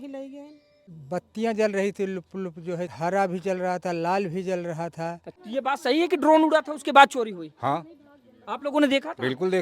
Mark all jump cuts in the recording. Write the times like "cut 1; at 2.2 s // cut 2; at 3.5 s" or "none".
cut 1; at 0.9 s // cut 2; at 2.9 s // cut 3; at 5.3 s